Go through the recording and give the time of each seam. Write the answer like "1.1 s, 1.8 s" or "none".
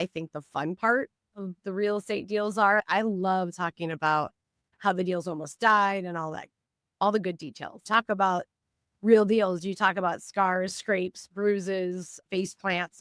2.8 s, 7.8 s